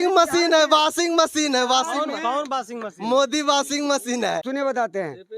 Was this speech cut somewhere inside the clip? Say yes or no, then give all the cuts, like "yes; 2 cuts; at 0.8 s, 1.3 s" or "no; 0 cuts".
yes; 1 cut; at 4.4 s